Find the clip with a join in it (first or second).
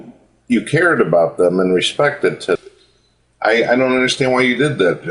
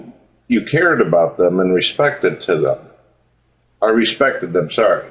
second